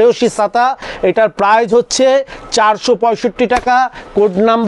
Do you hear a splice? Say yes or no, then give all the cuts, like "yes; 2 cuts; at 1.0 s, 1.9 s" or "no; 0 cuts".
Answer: no; 0 cuts